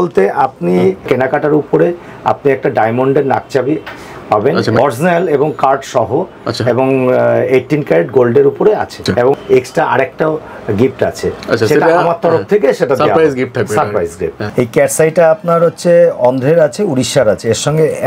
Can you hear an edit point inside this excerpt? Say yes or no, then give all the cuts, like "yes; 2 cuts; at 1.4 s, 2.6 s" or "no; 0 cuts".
yes; 4 cuts; at 1.1 s, 4.8 s, 9.2 s, 14.4 s